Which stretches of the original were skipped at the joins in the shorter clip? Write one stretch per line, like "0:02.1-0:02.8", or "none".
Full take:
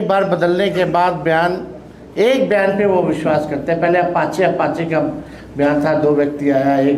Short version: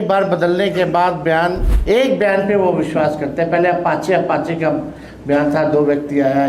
0:01.7-0:02.0